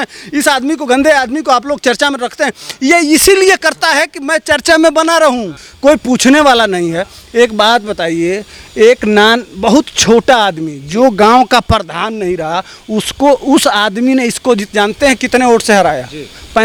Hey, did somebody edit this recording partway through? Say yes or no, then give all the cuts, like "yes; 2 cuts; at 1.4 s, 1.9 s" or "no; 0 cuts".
no; 0 cuts